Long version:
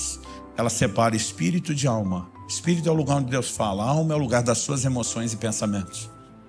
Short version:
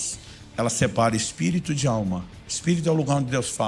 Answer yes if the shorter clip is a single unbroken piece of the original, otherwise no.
yes